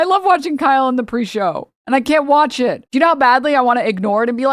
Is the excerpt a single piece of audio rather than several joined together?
no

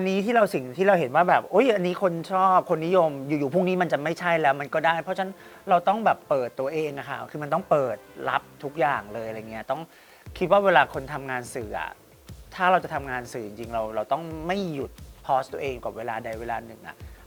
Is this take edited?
no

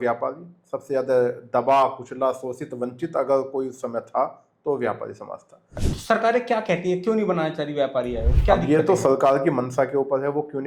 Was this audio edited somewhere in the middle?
yes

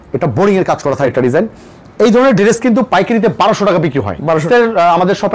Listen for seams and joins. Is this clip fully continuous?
no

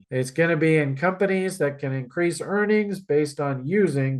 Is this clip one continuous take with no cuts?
yes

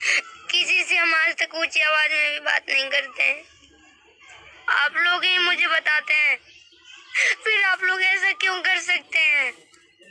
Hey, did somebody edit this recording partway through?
yes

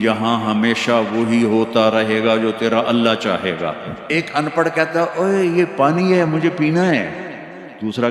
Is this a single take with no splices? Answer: no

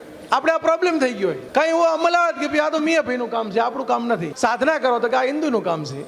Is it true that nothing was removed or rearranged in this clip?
no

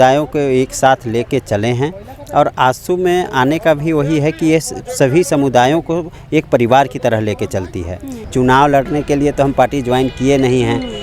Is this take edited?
yes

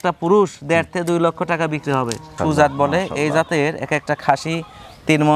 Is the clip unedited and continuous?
no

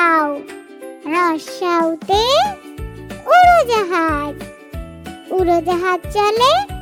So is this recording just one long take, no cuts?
yes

